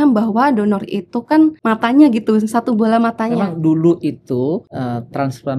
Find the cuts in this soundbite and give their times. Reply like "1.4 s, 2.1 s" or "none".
1.6 s, 3.3 s, 4.7 s

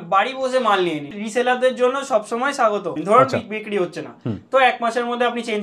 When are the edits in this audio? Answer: 1.1 s, 3.0 s

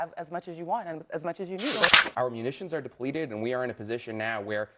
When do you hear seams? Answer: 1.9 s

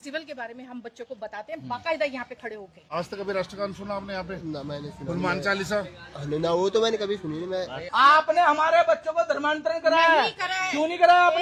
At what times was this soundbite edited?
none

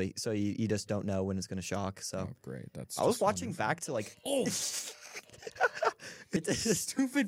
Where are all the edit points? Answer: 6.4 s

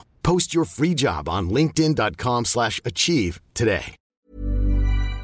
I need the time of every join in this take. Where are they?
4.0 s

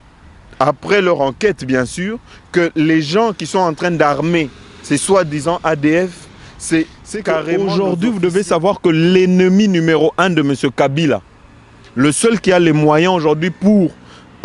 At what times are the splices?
7.5 s

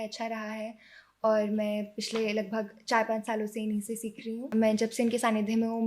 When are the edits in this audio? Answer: 4.4 s

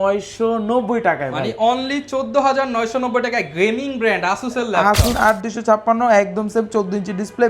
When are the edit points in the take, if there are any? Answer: 5.2 s

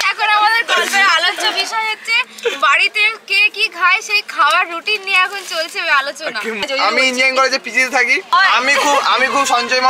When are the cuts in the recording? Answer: 6.6 s

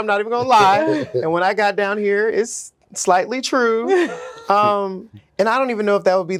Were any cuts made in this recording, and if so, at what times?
none

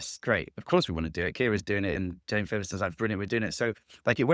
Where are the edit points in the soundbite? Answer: 2.0 s

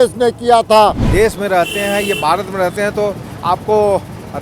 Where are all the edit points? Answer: 1.0 s

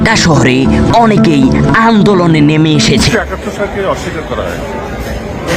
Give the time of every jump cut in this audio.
3.1 s

